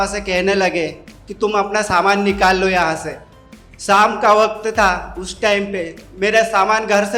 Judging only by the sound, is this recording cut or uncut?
uncut